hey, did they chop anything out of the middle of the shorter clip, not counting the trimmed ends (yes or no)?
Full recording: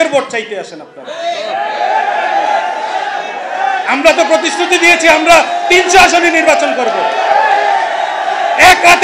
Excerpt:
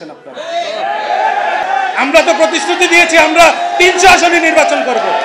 yes